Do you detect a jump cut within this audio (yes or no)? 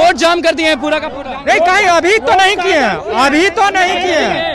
no